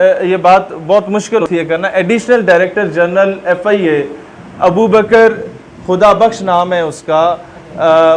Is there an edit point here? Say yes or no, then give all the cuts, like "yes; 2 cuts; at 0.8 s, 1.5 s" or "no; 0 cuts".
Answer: yes; 1 cut; at 1.4 s